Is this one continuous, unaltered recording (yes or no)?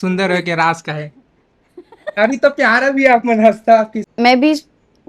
no